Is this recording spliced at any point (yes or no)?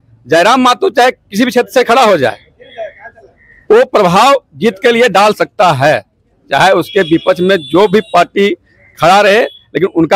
no